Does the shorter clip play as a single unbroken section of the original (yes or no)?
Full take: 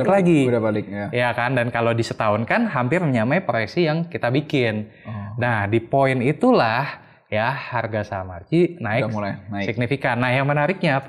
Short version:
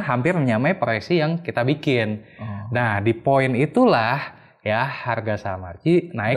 yes